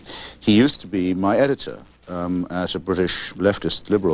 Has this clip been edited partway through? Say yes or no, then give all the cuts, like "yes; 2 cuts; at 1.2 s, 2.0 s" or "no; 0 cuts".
no; 0 cuts